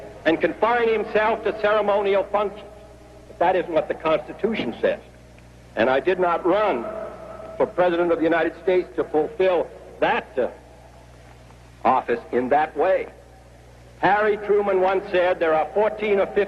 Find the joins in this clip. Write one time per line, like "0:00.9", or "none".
0:15.6